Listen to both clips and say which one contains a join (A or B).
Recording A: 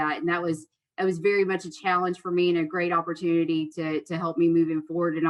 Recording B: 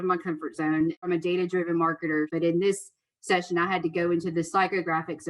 B